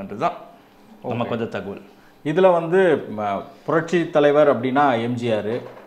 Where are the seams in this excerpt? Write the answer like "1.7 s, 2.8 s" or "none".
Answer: none